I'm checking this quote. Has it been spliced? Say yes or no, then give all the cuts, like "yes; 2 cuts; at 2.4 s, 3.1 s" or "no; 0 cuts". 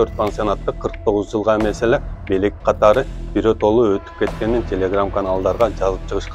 no; 0 cuts